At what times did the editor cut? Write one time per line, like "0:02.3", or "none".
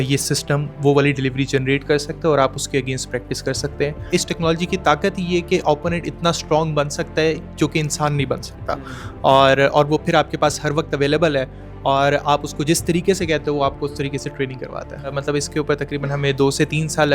0:04.0
0:15.2